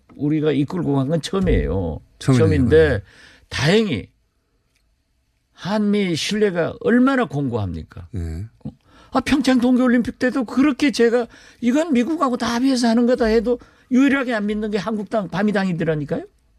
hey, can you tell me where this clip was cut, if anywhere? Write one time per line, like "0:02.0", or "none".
none